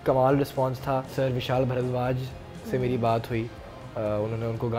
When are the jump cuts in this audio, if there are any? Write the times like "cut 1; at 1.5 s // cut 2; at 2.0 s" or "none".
cut 1; at 1.1 s